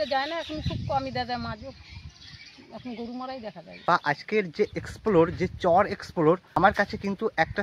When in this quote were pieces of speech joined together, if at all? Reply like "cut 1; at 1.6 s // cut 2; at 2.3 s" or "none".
cut 1; at 3.8 s // cut 2; at 6.5 s